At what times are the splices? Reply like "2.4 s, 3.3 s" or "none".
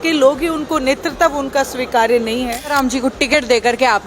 2.7 s